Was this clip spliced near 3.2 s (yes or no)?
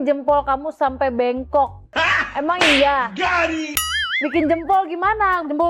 no